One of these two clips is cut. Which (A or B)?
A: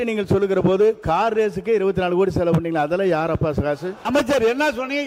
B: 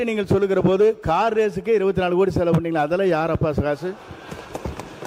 A